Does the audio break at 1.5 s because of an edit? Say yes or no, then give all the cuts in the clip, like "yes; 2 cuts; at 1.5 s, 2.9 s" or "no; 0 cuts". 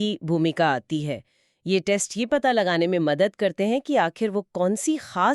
no; 0 cuts